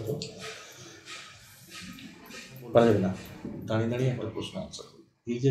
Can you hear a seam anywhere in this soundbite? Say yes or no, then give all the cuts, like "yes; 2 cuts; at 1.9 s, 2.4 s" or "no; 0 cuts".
yes; 1 cut; at 3.6 s